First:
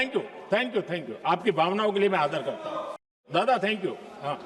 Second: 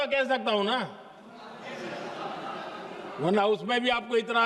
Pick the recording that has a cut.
first; 1 cut; at 3.2 s

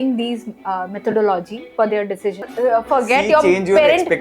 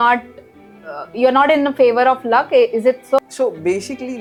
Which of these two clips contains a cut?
first; 1 cut; at 2.5 s

